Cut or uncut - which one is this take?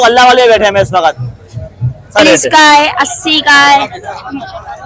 cut